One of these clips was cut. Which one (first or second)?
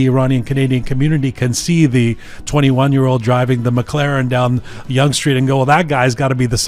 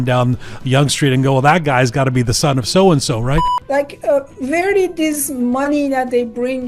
second